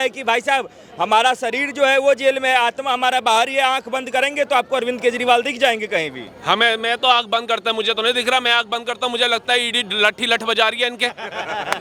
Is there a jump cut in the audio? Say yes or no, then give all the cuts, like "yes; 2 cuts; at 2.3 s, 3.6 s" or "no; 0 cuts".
no; 0 cuts